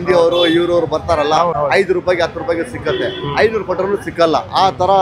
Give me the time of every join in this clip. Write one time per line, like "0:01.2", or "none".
0:01.5